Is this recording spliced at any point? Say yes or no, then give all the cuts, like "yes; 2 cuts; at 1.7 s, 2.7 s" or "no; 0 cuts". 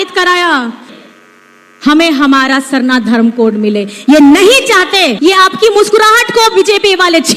yes; 2 cuts; at 0.9 s, 5.1 s